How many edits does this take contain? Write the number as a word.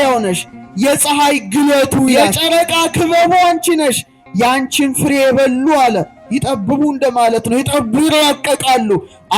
one